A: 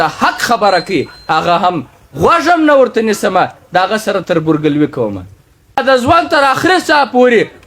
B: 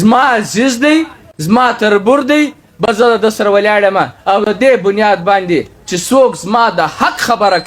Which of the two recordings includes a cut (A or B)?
A